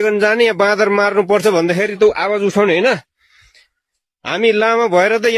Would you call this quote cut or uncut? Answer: uncut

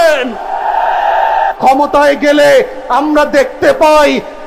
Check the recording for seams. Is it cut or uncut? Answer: cut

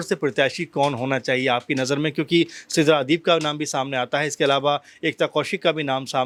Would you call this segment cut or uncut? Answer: uncut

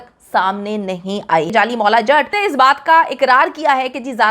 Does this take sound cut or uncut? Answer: cut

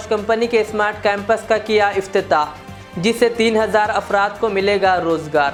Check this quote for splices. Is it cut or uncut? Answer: uncut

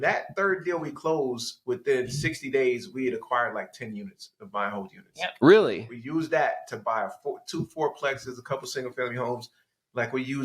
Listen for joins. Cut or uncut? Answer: uncut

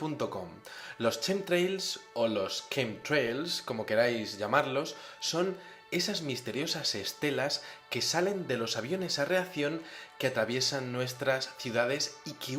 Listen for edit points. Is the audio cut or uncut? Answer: uncut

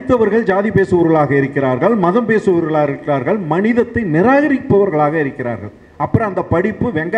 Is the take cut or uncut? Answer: uncut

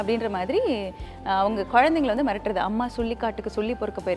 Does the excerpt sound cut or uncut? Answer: uncut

